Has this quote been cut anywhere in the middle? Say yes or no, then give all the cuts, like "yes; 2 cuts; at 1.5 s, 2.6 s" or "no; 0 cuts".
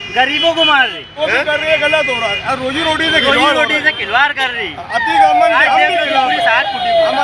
yes; 1 cut; at 1.0 s